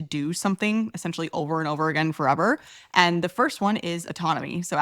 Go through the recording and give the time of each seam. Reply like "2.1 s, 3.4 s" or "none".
none

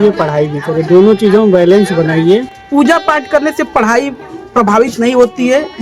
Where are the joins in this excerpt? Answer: 2.6 s

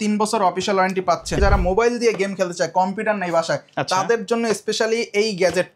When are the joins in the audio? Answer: 1.4 s

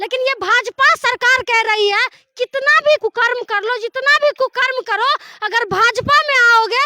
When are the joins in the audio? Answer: 3.0 s

